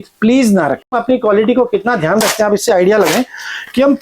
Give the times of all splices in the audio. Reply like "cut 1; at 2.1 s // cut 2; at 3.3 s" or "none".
cut 1; at 0.9 s